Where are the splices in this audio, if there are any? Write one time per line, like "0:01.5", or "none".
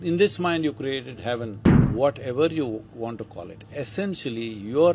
0:01.7